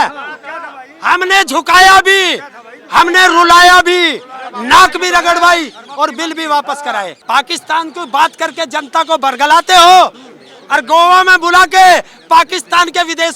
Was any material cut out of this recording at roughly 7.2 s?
yes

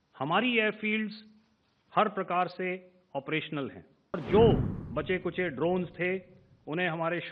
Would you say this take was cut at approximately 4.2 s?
yes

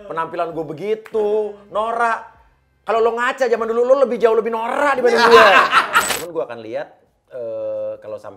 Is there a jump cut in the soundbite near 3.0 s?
no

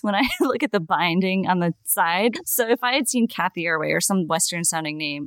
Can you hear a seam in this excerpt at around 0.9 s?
no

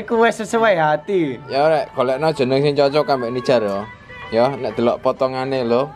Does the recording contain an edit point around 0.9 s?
no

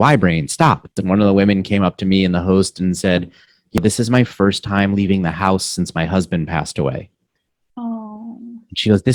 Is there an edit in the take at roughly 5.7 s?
no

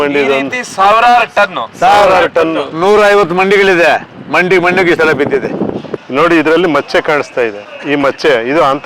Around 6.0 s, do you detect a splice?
yes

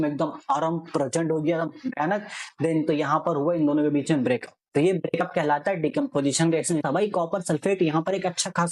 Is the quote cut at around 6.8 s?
yes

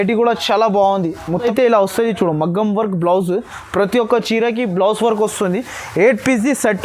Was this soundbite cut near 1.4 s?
yes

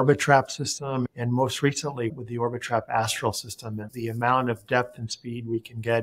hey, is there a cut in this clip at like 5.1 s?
no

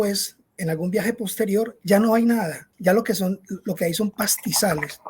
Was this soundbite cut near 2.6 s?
yes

